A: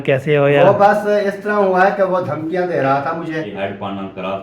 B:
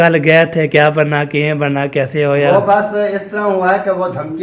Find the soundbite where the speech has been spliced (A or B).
A